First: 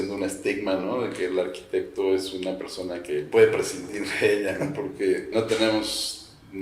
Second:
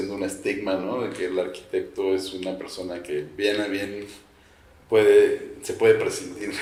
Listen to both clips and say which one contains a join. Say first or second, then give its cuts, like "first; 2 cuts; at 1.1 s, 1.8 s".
first; 2 cuts; at 3.3 s, 5.3 s